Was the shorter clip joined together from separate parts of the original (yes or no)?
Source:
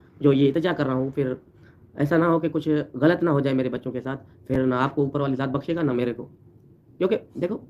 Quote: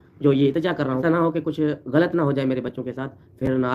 yes